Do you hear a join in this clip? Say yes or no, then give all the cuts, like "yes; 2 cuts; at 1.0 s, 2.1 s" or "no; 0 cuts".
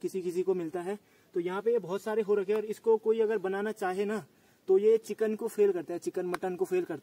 no; 0 cuts